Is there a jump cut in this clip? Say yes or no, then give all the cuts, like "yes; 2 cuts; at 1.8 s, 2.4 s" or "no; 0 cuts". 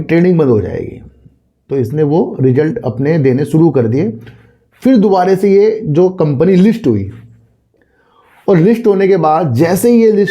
no; 0 cuts